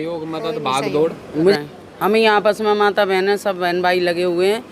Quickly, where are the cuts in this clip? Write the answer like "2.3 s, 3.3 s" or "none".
1.5 s